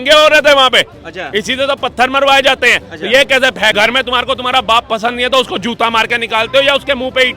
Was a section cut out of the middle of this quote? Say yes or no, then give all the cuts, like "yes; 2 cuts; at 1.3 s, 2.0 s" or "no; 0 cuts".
yes; 1 cut; at 3.7 s